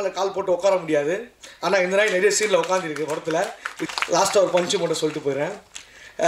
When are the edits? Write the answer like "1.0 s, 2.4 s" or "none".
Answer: 3.9 s